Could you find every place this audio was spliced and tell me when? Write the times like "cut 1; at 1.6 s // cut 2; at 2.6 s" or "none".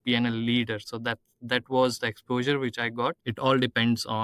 cut 1; at 3.2 s